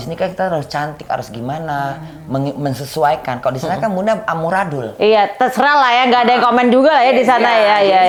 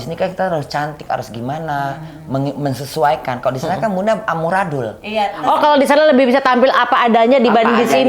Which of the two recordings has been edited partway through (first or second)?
second